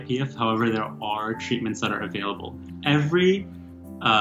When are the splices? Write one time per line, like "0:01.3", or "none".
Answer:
0:02.7

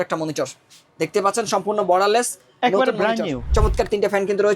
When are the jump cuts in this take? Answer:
0:03.4

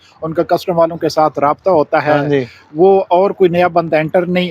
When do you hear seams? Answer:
none

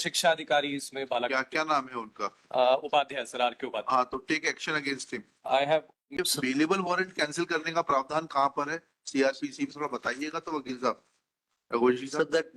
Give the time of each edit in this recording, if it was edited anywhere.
0:06.2

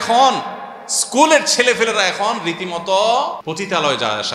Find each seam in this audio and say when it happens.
0:03.4

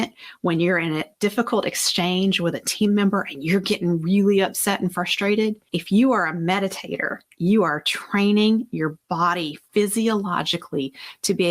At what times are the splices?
none

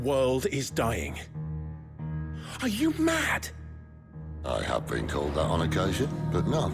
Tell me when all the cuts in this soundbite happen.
none

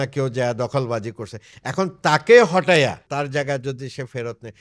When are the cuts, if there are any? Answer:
0:03.0

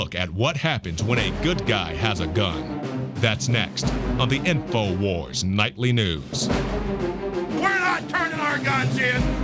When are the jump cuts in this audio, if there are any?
0:04.6

